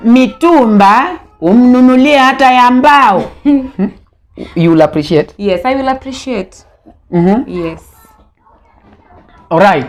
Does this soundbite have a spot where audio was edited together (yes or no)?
no